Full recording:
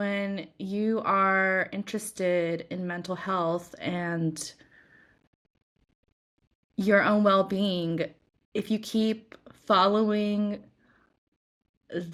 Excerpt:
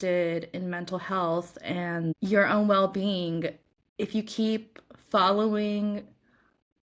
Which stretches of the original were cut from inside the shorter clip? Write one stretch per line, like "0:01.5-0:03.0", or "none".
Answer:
0:04.3-0:06.7